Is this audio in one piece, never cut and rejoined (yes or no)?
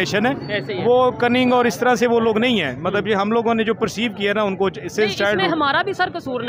yes